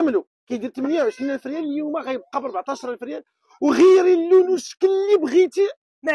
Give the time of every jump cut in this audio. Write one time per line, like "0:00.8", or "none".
none